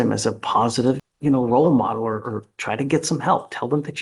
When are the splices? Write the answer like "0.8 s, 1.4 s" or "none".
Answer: 1.1 s